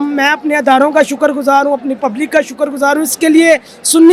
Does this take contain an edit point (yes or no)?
no